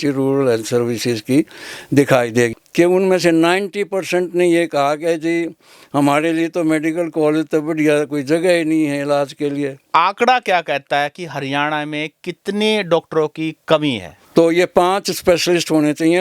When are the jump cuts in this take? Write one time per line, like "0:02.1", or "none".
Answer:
0:02.5
0:09.8
0:14.1